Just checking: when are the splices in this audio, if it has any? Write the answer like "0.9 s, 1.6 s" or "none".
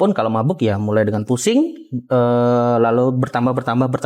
none